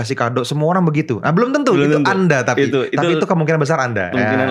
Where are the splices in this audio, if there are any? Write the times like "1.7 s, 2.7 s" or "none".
none